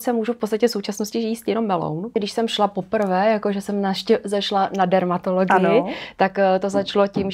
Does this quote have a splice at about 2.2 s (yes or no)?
yes